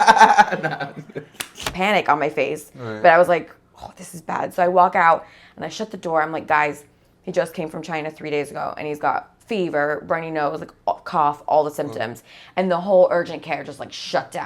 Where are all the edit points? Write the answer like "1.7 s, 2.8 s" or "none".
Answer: 1.6 s